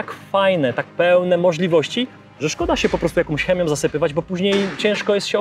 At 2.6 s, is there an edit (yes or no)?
no